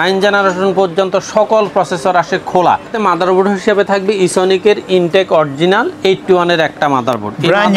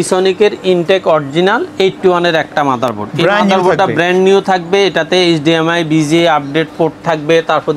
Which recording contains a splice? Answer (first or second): first